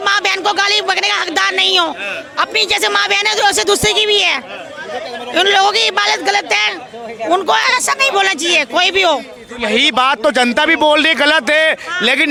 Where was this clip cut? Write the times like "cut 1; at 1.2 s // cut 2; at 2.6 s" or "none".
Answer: none